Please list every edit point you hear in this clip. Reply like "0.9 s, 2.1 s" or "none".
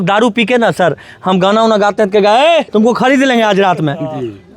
2.7 s